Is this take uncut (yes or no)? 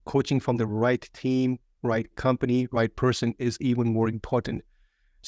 yes